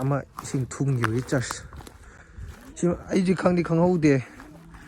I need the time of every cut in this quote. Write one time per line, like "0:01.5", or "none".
none